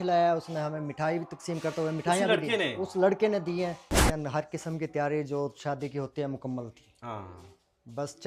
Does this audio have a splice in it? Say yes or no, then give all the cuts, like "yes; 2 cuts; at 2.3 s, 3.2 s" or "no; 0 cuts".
yes; 1 cut; at 4.0 s